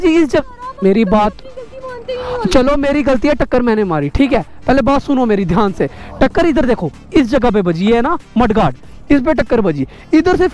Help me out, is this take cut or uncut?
uncut